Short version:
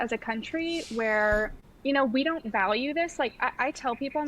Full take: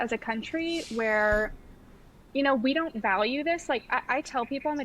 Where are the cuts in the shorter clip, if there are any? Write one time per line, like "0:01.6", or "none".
0:01.6